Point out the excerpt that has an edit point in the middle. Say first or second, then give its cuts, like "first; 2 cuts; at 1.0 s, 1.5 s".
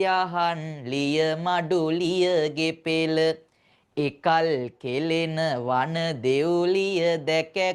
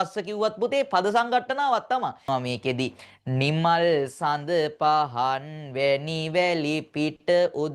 second; 1 cut; at 2.2 s